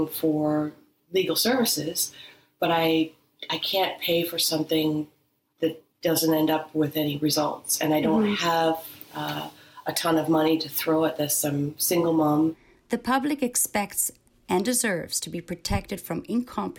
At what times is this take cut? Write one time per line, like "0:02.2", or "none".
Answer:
0:12.7